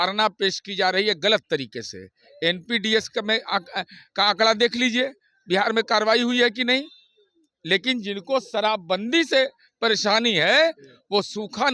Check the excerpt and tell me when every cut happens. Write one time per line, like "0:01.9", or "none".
none